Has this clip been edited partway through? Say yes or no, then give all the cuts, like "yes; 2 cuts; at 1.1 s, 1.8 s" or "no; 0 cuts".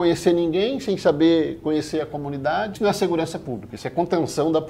yes; 1 cut; at 2.7 s